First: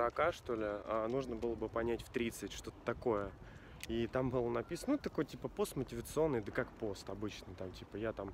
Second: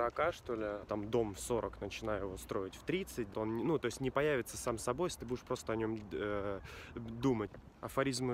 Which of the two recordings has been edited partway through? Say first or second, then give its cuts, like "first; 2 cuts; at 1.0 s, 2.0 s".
second; 3 cuts; at 0.9 s, 3.3 s, 7.5 s